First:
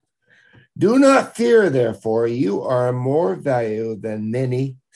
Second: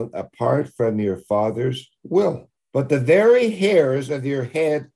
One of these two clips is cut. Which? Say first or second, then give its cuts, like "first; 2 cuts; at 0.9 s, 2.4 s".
second; 1 cut; at 2.5 s